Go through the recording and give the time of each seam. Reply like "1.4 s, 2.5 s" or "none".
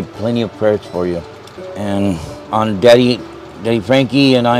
2.3 s